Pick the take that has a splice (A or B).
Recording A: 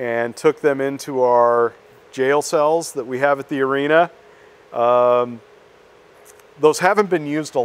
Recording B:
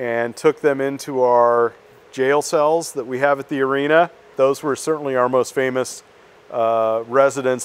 B